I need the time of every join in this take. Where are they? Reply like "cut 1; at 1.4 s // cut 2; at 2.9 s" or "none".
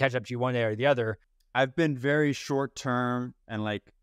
cut 1; at 1.4 s